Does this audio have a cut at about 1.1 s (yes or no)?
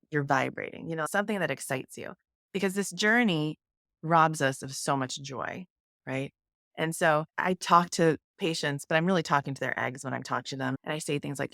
yes